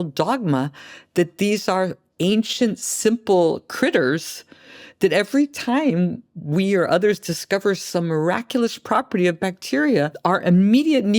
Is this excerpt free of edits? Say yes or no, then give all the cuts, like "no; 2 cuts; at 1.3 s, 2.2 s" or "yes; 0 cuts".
no; 1 cut; at 10.1 s